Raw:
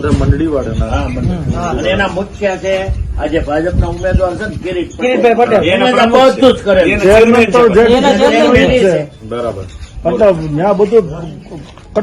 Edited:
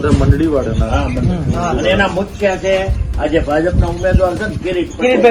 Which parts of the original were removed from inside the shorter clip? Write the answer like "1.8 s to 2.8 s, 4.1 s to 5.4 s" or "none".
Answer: none